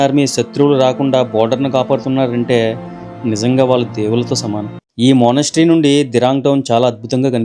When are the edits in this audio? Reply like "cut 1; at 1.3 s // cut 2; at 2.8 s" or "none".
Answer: cut 1; at 4.8 s